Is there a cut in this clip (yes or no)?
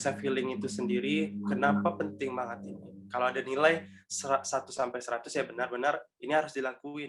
no